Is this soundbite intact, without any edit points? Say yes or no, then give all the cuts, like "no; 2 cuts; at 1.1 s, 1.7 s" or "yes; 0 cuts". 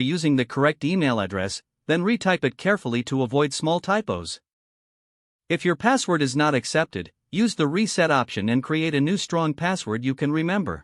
yes; 0 cuts